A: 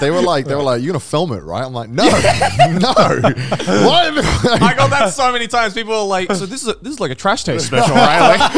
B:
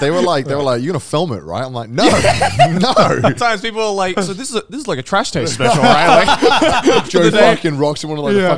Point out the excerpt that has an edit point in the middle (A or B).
B